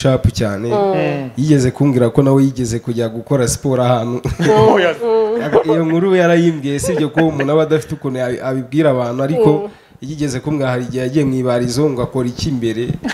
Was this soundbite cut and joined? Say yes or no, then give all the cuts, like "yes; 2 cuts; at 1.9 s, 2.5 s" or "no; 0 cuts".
no; 0 cuts